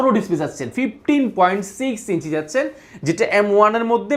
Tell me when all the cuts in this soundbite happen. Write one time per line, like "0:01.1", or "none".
none